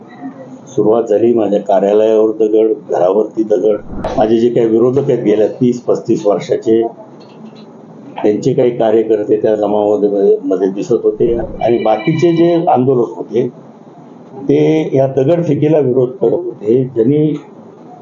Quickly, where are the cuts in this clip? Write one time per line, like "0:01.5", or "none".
0:04.1
0:11.4